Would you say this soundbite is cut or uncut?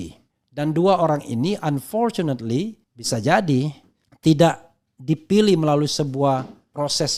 uncut